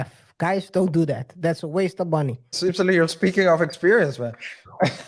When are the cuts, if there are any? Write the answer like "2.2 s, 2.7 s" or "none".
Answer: 2.4 s